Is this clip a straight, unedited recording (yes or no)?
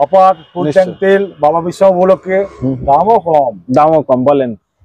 yes